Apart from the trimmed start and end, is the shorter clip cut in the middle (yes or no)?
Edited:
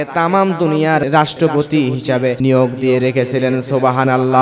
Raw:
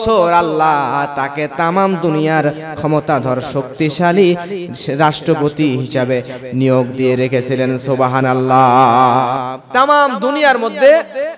yes